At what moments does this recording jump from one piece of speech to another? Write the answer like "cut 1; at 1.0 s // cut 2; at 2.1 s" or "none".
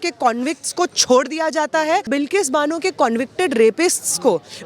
cut 1; at 2.1 s